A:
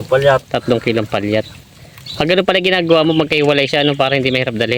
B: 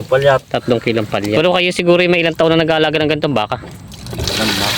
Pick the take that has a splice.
B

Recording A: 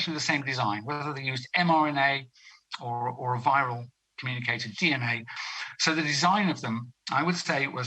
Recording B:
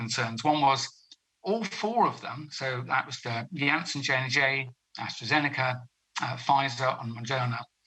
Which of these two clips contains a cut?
A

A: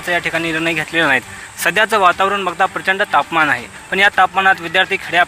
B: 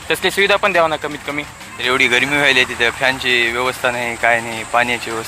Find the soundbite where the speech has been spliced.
B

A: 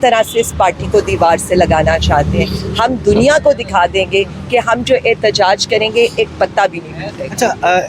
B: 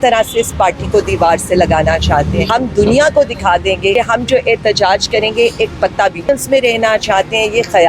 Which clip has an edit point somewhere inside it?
B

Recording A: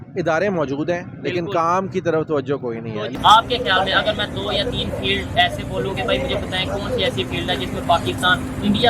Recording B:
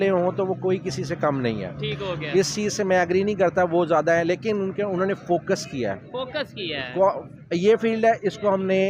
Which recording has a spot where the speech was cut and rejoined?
A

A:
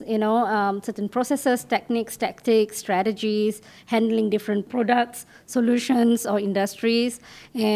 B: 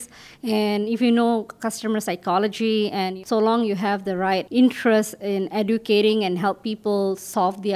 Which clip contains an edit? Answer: B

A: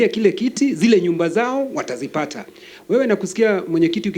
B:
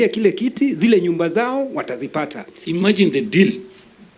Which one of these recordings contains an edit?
B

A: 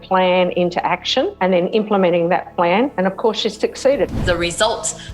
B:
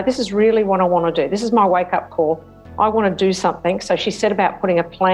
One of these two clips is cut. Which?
A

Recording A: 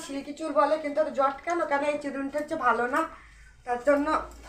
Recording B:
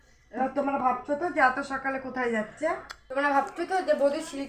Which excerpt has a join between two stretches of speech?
B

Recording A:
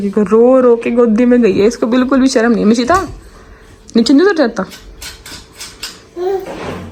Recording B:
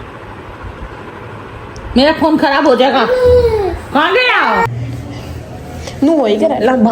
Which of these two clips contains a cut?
B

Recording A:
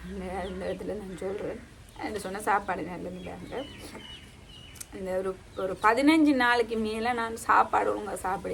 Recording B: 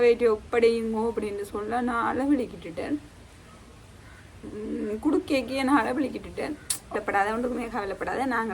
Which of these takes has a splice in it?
B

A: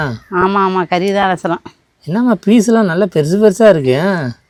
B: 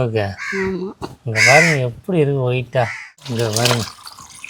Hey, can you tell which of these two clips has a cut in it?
B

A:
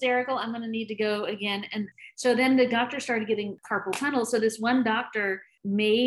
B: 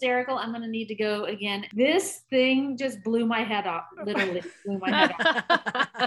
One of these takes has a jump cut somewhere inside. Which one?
B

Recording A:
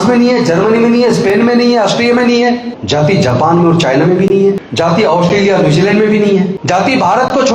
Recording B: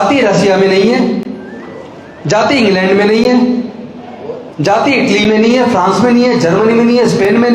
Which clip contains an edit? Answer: A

